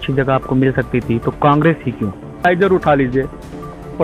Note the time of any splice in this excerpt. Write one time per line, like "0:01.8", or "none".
0:02.4